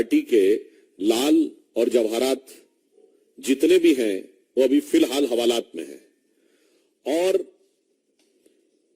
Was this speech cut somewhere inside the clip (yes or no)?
no